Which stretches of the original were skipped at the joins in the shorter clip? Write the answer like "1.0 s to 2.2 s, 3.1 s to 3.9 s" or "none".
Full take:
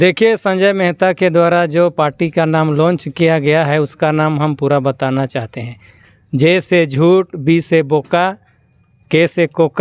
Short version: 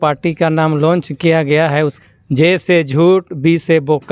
3.9 s to 6.0 s